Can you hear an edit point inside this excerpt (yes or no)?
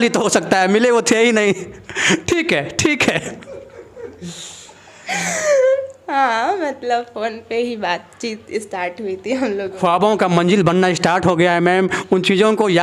no